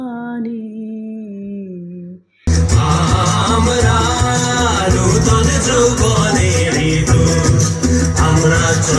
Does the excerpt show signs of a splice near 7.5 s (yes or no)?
no